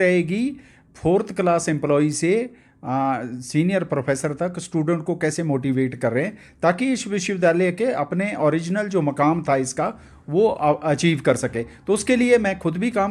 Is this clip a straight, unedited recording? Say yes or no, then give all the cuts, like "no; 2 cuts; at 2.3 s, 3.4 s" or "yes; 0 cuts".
yes; 0 cuts